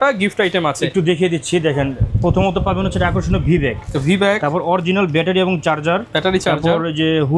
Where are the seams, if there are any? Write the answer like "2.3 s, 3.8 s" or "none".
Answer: none